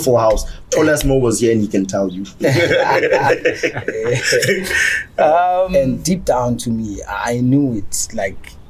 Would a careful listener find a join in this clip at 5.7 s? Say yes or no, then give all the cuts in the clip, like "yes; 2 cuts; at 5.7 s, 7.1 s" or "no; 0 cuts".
yes; 1 cut; at 5.7 s